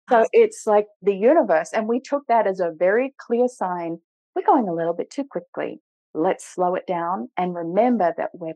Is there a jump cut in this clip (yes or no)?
yes